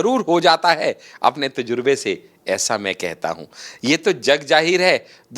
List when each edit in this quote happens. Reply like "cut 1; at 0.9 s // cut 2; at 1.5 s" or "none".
none